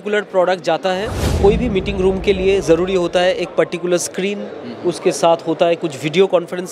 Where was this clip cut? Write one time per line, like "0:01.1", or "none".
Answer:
0:01.2